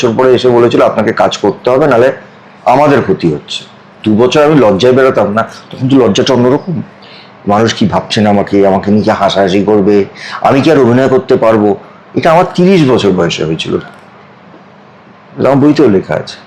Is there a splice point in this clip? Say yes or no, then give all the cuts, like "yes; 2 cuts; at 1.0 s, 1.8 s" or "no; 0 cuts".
no; 0 cuts